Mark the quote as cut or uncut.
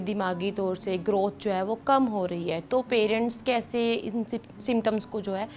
uncut